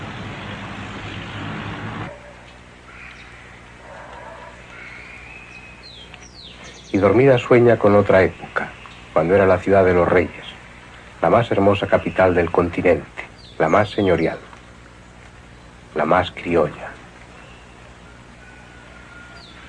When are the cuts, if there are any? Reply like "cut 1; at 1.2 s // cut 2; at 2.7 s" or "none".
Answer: cut 1; at 13.7 s